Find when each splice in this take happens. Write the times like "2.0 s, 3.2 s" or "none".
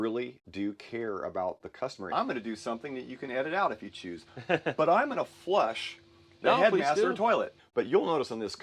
2.0 s, 7.5 s

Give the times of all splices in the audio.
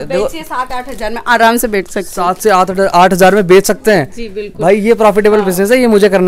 none

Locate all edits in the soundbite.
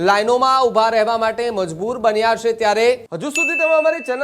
3.2 s

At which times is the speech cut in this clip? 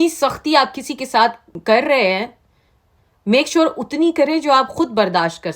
1.5 s

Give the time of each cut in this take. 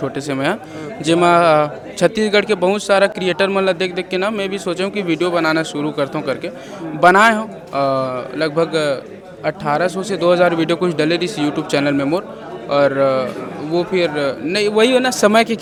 none

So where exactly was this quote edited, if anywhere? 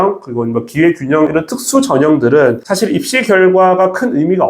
1.3 s, 2.7 s

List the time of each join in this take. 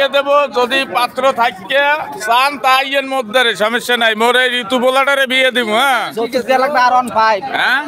none

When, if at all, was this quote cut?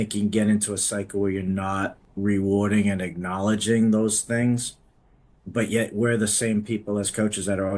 2.0 s

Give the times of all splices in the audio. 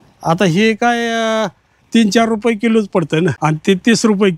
3.4 s

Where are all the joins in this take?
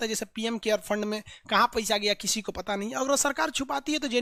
none

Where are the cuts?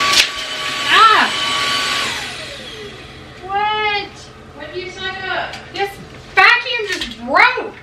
none

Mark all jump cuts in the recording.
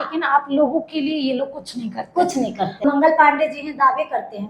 2.8 s

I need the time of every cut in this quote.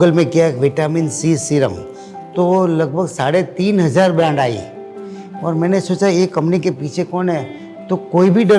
none

